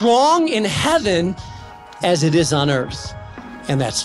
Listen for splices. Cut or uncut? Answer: cut